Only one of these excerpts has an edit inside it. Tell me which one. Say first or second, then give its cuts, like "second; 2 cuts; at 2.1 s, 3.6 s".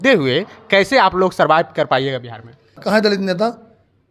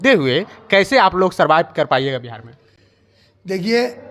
first; 1 cut; at 2.8 s